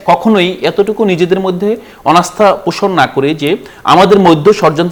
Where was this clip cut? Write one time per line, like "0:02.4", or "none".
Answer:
none